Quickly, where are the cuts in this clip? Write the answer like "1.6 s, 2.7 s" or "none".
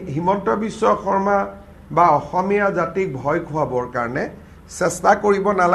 none